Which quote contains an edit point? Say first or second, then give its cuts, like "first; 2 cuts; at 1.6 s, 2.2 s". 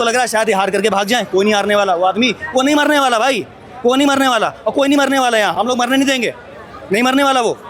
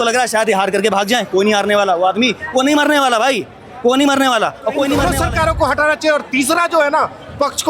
second; 1 cut; at 5.1 s